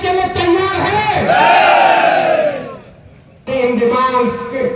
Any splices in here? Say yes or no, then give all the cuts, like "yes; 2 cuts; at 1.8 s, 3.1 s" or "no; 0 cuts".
yes; 1 cut; at 3.4 s